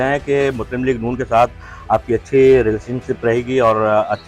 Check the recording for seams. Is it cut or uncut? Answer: uncut